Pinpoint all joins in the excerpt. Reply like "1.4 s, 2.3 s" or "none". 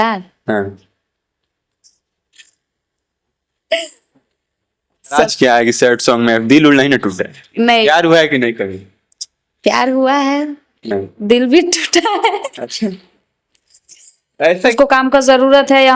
5.2 s, 14.7 s